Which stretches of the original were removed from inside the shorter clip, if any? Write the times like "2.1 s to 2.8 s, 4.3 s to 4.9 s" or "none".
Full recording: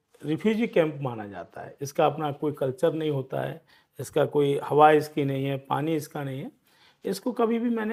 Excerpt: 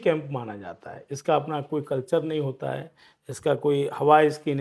none